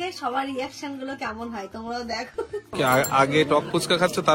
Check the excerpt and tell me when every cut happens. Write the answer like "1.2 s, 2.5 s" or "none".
2.6 s